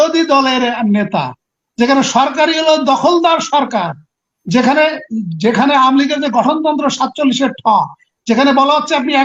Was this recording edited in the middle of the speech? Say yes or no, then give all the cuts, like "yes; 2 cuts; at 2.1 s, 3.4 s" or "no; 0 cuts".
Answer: no; 0 cuts